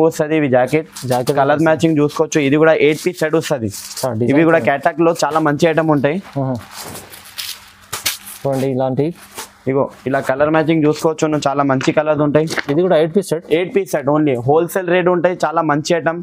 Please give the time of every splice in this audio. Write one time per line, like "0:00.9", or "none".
none